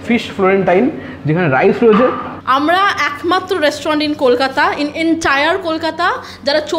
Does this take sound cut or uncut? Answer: cut